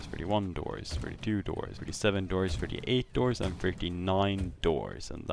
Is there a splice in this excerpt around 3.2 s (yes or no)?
no